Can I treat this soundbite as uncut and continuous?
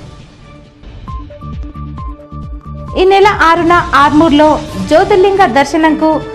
no; 1 cut; at 1.7 s

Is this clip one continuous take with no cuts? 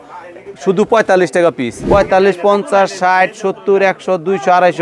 no; 1 cut; at 1.7 s

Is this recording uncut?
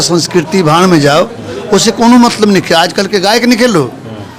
yes; 0 cuts

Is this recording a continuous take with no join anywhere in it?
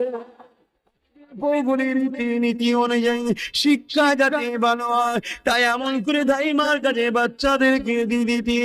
no; 1 cut; at 1.4 s

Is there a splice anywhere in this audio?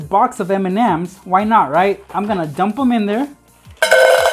no; 0 cuts

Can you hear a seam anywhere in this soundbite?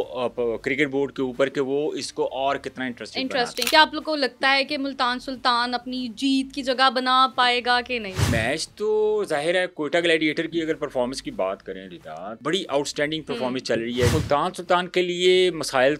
yes; 4 cuts; at 3.6 s, 8.3 s, 12.3 s, 14.1 s

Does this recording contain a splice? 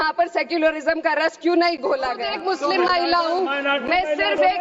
yes; 1 cut; at 2.3 s

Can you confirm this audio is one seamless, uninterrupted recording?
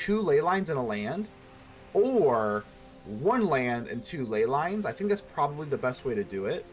yes; 0 cuts

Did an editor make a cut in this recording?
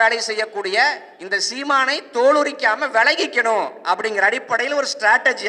no; 0 cuts

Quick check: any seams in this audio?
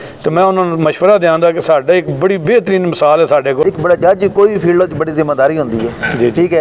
yes; 1 cut; at 3.6 s

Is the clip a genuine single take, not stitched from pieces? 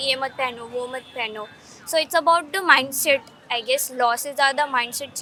yes; 0 cuts

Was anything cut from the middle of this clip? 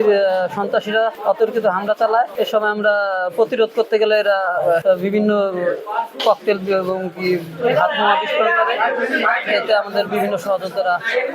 yes; 3 cuts; at 1.2 s, 2.3 s, 4.8 s

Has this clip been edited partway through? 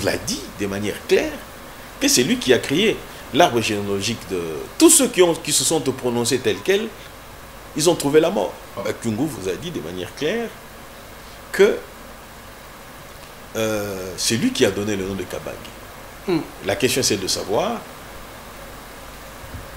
yes; 1 cut; at 8.8 s

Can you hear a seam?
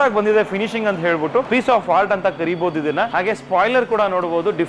yes; 2 cuts; at 1.5 s, 3.1 s

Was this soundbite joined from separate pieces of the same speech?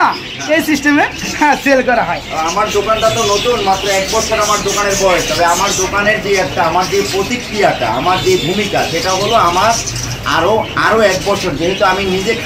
no; 0 cuts

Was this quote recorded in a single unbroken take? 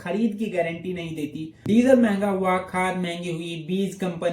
no; 1 cut; at 1.5 s

